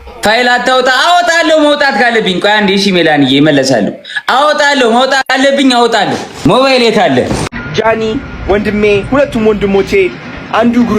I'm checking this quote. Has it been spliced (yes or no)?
yes